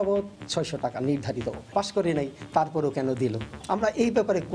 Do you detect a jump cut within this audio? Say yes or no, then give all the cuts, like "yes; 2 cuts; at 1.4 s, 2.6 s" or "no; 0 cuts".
yes; 2 cuts; at 1.7 s, 3.6 s